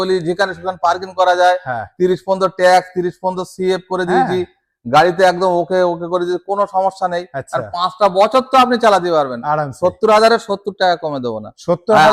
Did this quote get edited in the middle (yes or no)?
no